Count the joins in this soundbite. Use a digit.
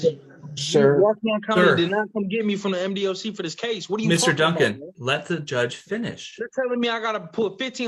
0